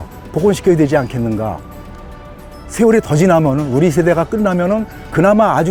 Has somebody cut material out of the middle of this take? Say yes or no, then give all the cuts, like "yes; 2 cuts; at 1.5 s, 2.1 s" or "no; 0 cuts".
no; 0 cuts